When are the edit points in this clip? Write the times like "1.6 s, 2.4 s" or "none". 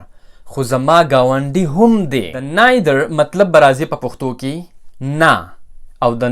2.4 s